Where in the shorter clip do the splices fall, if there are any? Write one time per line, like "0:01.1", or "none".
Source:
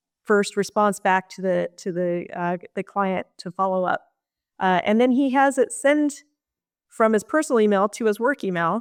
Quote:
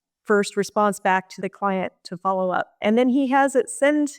0:01.3
0:02.8